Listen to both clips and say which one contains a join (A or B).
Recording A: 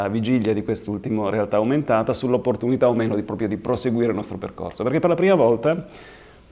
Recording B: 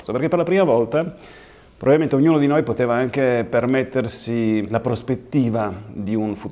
B